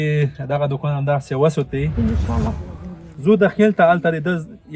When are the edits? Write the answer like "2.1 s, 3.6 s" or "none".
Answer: 2.6 s